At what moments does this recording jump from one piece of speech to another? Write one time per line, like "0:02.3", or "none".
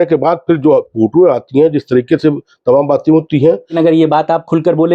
0:03.8